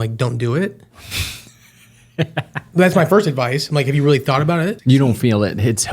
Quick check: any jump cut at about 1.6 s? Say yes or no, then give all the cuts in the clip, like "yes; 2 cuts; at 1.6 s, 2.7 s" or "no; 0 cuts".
no; 1 cut; at 4.8 s